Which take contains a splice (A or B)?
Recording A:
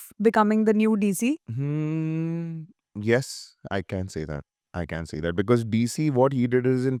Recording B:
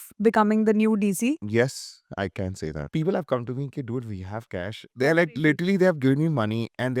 B